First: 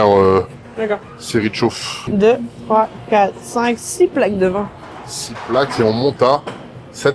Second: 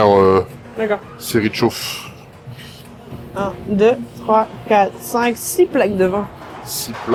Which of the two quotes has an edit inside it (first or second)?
first